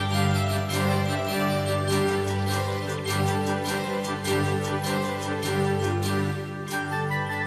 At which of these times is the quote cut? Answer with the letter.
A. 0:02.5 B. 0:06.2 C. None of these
A